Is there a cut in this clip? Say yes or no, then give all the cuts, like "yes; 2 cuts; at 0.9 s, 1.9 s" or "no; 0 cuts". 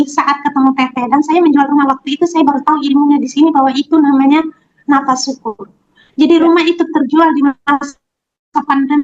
no; 0 cuts